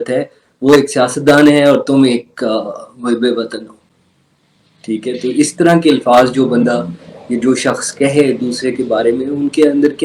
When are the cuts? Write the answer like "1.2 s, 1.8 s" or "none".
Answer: none